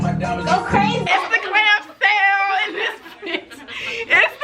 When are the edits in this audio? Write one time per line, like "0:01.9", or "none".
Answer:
0:01.0